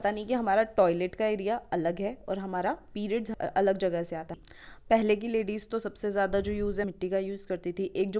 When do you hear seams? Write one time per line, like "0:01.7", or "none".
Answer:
0:03.3
0:04.3
0:06.9